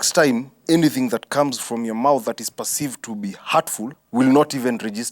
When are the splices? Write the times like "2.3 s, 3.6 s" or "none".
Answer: 4.0 s